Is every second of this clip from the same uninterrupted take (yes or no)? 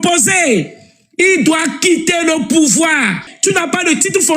no